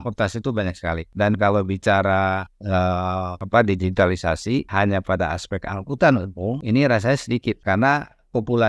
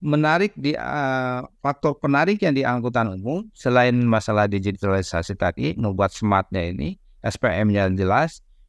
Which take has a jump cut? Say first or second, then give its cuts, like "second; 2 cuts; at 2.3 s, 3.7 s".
first; 5 cuts; at 1.1 s, 3.4 s, 4.7 s, 6.6 s, 7.6 s